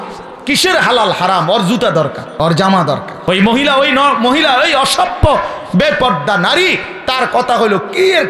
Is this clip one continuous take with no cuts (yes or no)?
no